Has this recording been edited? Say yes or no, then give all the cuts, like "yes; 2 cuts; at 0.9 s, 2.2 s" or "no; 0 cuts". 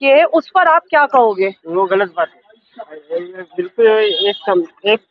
no; 0 cuts